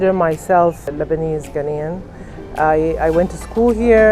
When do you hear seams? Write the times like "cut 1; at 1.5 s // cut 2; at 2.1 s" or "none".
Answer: cut 1; at 0.9 s